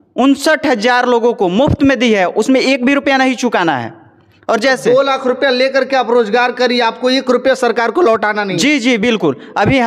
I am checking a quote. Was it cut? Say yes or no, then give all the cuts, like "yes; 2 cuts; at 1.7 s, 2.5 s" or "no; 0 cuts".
no; 0 cuts